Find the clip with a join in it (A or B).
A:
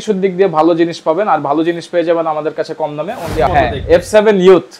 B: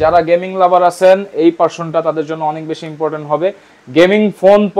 A